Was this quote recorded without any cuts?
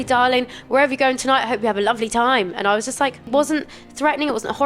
no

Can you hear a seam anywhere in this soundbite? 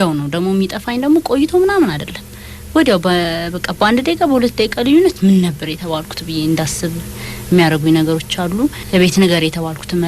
yes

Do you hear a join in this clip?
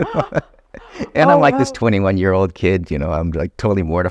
no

